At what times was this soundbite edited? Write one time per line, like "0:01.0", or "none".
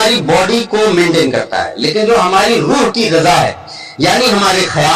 0:02.7